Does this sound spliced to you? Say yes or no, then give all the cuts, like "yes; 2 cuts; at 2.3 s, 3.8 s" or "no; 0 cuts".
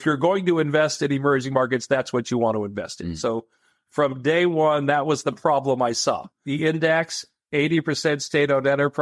no; 0 cuts